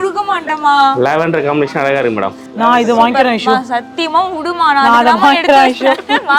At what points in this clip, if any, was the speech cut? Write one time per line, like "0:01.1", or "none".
0:02.4